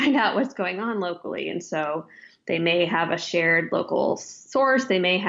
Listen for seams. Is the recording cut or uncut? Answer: uncut